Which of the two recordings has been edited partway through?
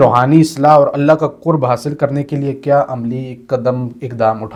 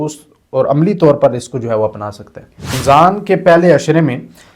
second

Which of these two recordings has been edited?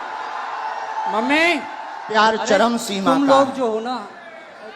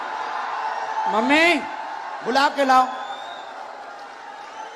first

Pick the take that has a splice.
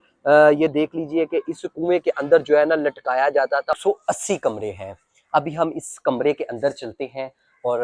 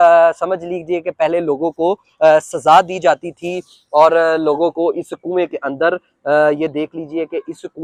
first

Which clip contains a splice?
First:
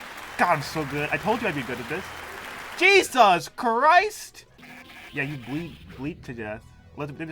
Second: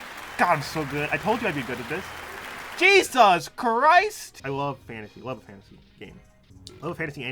second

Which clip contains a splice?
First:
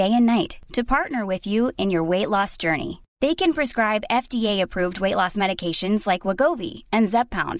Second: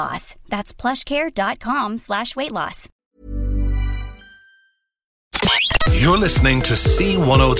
second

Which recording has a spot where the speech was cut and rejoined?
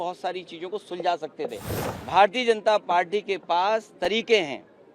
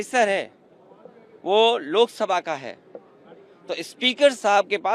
first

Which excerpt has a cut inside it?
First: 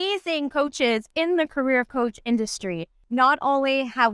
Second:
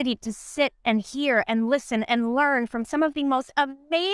first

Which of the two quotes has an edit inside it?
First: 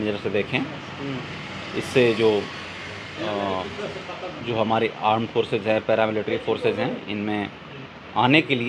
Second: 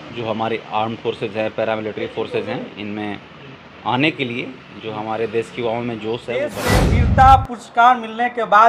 second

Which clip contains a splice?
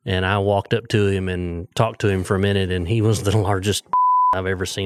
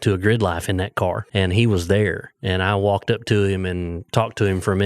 second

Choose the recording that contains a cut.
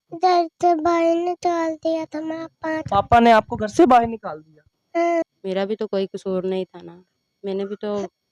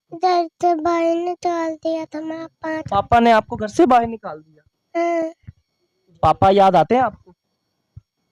first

